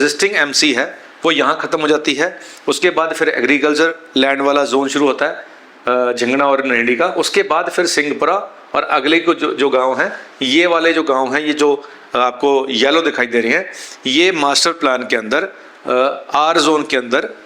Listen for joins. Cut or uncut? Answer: uncut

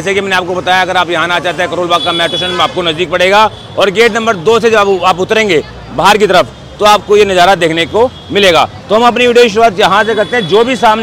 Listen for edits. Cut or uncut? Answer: uncut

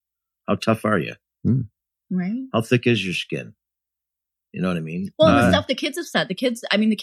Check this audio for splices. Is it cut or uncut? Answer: uncut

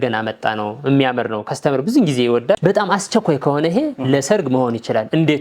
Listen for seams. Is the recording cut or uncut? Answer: cut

